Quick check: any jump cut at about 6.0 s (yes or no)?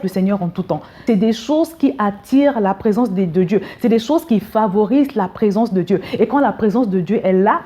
no